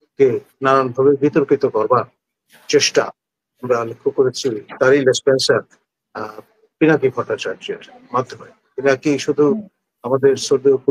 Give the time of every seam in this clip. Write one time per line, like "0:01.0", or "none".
none